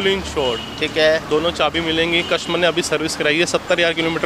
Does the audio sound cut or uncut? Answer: uncut